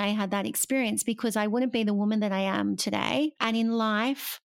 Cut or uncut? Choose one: cut